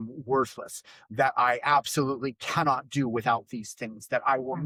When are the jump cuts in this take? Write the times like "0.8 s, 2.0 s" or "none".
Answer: none